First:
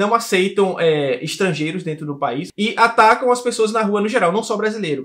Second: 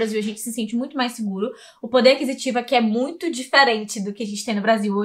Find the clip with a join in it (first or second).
first